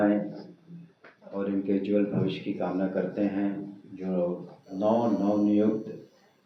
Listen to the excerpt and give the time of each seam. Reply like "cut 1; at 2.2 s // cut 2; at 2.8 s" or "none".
none